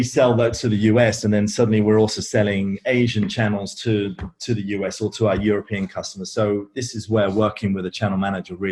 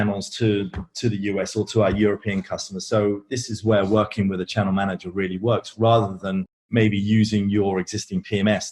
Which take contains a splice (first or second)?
second